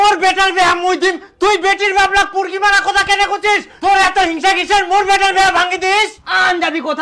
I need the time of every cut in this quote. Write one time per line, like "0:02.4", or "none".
none